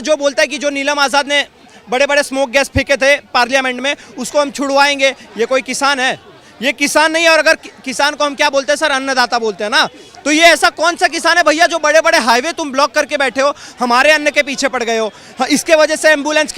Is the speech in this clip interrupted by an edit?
no; 0 cuts

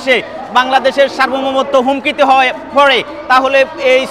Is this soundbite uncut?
yes; 0 cuts

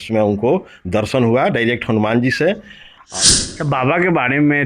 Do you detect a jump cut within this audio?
yes; 1 cut; at 3.0 s

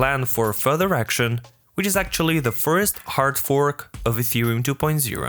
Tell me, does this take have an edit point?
no; 0 cuts

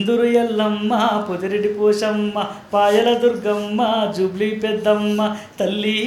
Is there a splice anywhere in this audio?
no; 0 cuts

